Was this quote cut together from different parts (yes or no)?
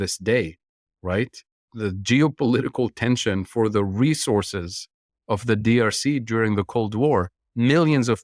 yes